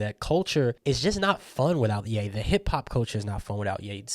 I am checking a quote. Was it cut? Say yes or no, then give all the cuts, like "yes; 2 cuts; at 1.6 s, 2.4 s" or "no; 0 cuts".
yes; 1 cut; at 2.2 s